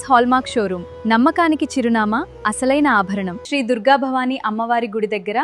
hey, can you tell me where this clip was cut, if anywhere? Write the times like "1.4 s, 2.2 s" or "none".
3.4 s